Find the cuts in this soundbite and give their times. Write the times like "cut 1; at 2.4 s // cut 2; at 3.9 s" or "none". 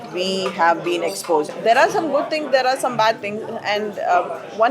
cut 1; at 1.5 s